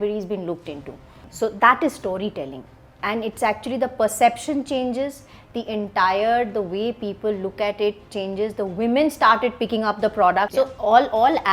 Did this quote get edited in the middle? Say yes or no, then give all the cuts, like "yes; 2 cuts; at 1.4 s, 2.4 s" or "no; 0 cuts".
yes; 2 cuts; at 1.2 s, 10.5 s